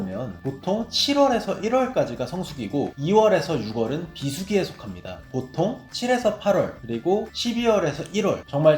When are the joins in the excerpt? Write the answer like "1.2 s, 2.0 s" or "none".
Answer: 5.2 s